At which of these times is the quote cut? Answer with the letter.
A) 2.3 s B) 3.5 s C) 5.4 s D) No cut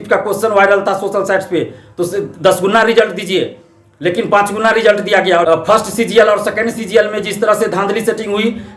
C